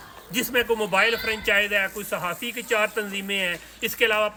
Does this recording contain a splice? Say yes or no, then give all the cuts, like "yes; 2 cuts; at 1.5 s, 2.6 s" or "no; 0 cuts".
no; 0 cuts